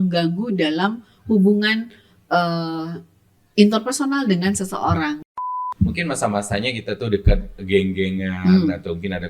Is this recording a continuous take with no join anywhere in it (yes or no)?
no